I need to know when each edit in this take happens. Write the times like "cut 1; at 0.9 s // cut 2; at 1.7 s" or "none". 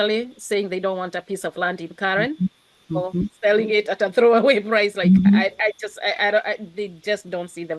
none